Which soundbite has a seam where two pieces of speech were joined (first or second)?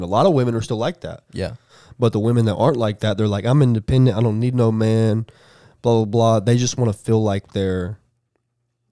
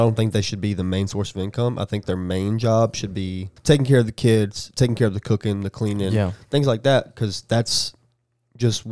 second